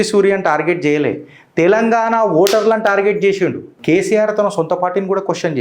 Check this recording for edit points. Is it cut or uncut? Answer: cut